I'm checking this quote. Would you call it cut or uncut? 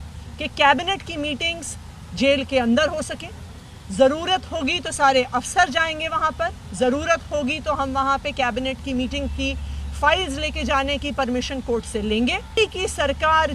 cut